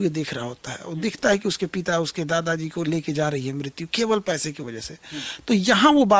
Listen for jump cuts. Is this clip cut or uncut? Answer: uncut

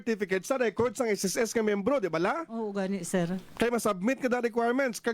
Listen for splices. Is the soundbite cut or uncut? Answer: uncut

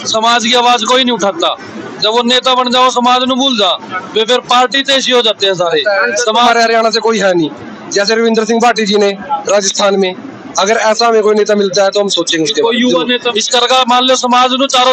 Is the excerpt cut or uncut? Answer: cut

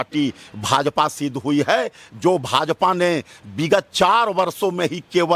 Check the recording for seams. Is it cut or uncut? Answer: uncut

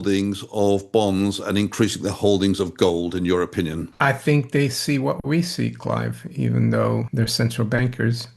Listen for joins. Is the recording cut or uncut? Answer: cut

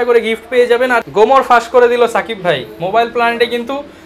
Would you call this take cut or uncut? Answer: cut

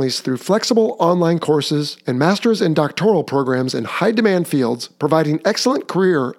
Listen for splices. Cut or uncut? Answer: uncut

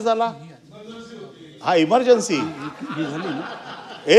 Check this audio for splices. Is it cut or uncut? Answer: uncut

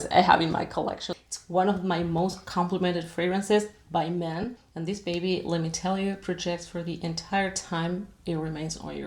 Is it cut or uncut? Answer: cut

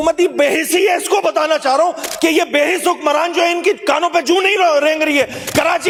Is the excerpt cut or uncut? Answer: uncut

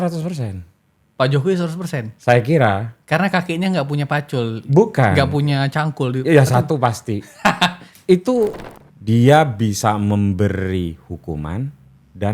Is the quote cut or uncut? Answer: cut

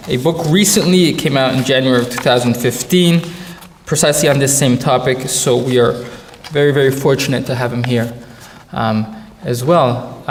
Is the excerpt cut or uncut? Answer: uncut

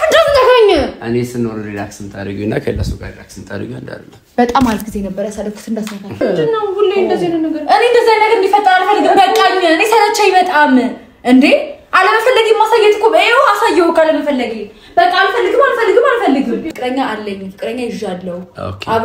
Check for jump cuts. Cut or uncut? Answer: cut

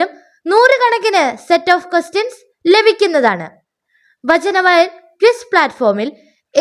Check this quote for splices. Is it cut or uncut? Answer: uncut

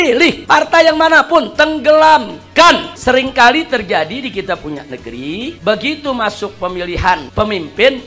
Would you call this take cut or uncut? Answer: cut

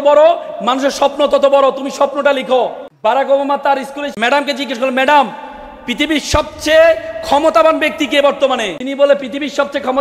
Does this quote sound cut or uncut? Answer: cut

